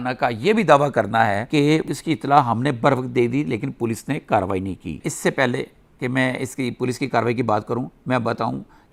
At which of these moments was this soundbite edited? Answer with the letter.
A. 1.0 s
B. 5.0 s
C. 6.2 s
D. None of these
D